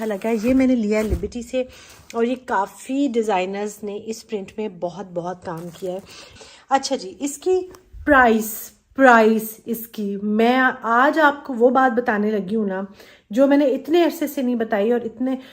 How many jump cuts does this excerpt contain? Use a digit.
1